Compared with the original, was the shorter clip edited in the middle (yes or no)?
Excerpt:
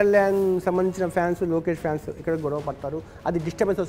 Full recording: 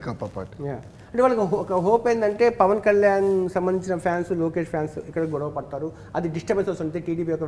no